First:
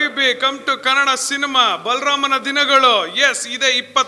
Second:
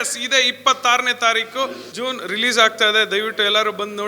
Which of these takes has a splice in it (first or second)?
second